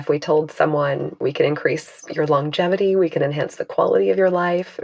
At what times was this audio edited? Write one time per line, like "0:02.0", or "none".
none

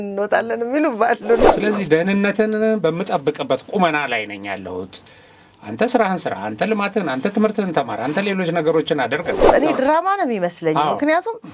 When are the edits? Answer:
0:01.5
0:09.5

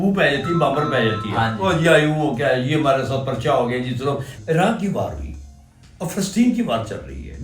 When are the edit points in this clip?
0:04.3

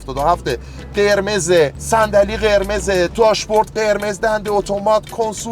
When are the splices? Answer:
0:01.8
0:03.1

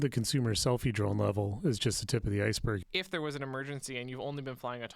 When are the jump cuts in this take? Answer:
0:02.8

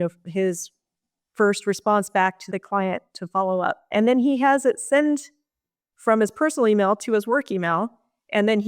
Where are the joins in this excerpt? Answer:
0:02.4
0:03.9

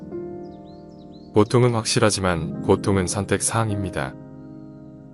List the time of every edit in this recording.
0:04.1

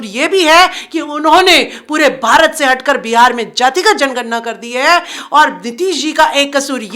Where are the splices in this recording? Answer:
none

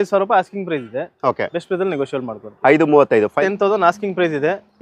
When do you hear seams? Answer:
0:03.4

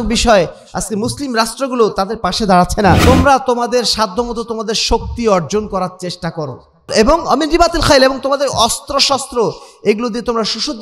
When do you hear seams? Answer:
0:03.0
0:06.9

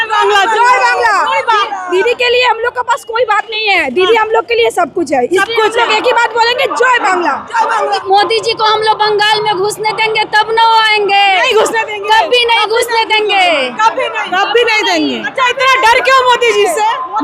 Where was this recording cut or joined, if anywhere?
0:08.0

